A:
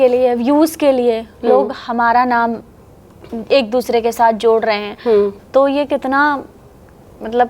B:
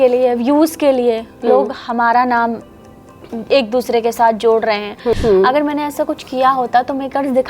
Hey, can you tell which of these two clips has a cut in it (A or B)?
B